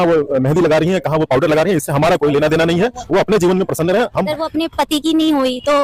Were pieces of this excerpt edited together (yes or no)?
yes